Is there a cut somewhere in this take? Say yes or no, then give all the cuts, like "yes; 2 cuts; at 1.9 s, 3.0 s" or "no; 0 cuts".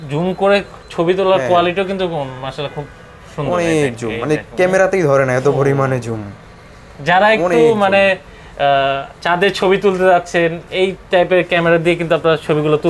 no; 0 cuts